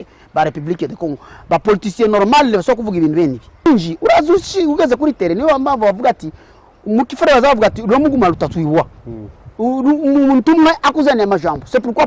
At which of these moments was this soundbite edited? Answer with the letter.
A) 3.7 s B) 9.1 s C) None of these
A